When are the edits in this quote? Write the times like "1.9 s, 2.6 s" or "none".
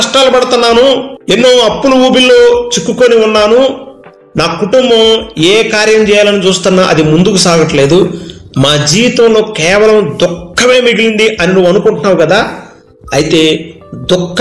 1.1 s